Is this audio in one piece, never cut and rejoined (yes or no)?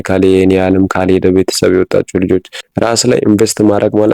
no